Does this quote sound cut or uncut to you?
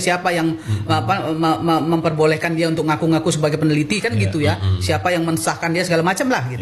uncut